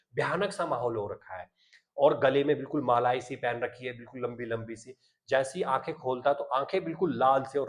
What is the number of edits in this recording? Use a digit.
0